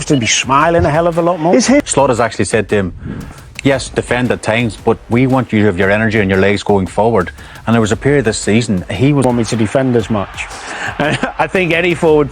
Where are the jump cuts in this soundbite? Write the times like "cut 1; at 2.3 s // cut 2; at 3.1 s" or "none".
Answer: cut 1; at 1.9 s // cut 2; at 9.2 s